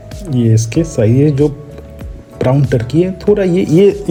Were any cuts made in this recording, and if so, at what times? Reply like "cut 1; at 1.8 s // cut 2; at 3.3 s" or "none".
none